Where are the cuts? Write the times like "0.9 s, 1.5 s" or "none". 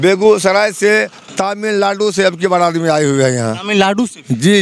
none